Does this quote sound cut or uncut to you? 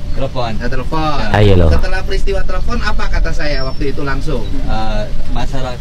uncut